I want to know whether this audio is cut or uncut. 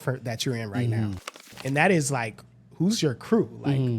cut